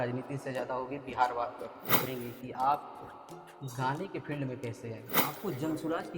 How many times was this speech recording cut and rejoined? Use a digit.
2